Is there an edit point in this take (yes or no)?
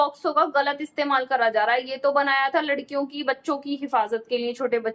no